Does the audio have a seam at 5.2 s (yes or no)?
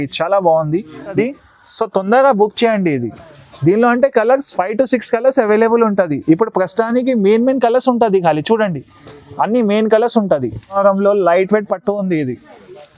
no